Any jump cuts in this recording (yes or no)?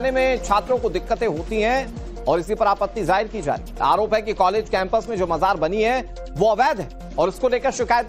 yes